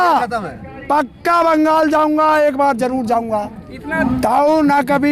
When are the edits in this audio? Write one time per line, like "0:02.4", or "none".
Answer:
0:03.9